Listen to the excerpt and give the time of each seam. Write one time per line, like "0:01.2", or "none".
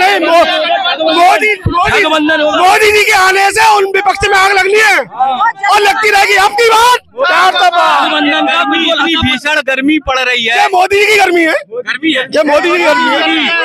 none